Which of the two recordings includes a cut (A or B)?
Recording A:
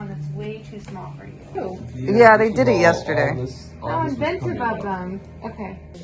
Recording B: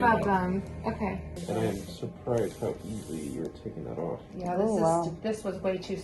A